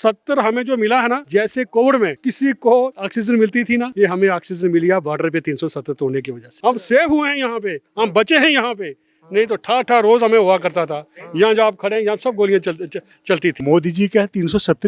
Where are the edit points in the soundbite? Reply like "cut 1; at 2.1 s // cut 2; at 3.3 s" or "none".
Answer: cut 1; at 1.2 s // cut 2; at 2.2 s // cut 3; at 3.3 s // cut 4; at 6.4 s // cut 5; at 13.6 s

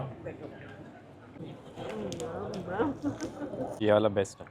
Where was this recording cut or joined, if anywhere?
cut 1; at 1.4 s // cut 2; at 3.7 s

